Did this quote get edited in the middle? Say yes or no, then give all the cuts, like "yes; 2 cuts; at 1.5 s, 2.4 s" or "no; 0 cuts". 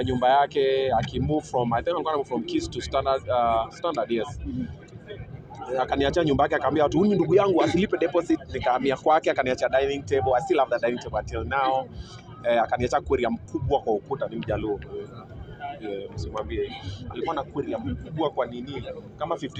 no; 0 cuts